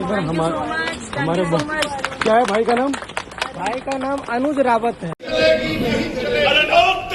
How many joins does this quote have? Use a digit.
1